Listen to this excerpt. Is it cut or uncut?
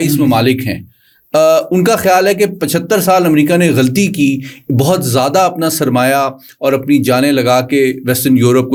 uncut